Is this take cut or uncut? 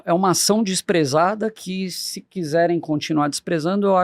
uncut